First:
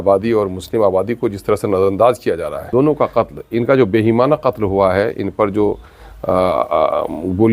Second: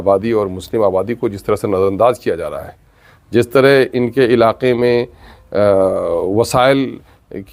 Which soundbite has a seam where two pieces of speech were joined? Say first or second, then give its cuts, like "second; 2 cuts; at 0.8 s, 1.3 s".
first; 1 cut; at 2.7 s